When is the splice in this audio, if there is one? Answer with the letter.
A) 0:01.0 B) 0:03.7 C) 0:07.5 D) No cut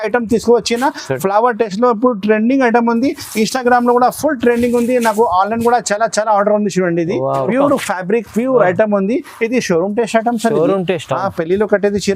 C